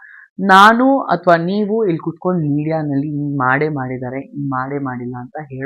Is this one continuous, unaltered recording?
yes; 0 cuts

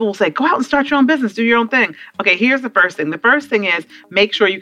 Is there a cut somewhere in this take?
no; 0 cuts

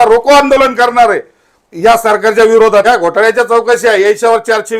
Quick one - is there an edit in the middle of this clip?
yes; 1 cut; at 2.8 s

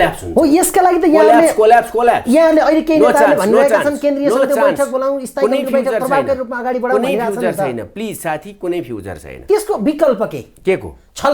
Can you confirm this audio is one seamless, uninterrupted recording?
yes; 0 cuts

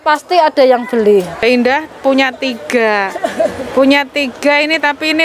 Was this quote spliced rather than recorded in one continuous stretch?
yes; 1 cut; at 1.4 s

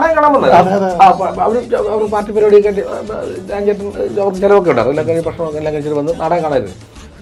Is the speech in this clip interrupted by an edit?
no; 0 cuts

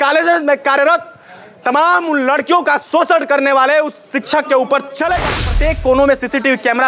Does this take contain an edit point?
yes; 1 cut; at 5.5 s

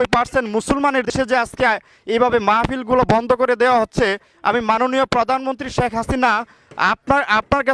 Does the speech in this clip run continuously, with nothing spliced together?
no; 1 cut; at 1.1 s

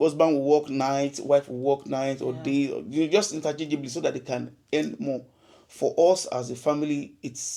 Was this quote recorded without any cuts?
yes; 0 cuts

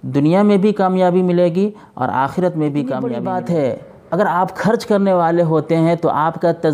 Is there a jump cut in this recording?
yes; 1 cut; at 3.1 s

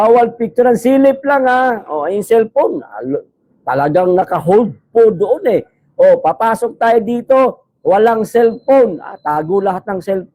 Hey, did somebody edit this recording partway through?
no; 0 cuts

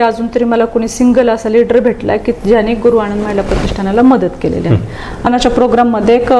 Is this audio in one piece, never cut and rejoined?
no; 1 cut; at 5.3 s

